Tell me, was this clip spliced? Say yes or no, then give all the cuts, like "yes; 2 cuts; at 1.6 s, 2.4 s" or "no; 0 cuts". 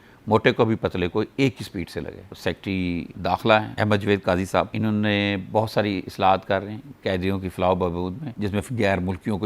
yes; 2 cuts; at 2.2 s, 8.2 s